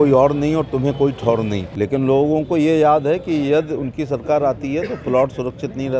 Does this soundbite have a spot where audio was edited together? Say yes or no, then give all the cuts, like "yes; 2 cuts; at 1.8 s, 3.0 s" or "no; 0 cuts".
yes; 1 cut; at 1.7 s